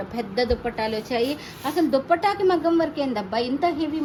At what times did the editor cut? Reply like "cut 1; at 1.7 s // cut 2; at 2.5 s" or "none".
none